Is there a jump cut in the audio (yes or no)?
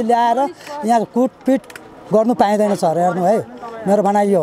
no